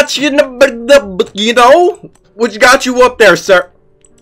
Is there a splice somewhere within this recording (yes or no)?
no